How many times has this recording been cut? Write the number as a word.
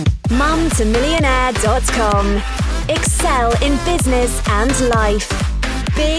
zero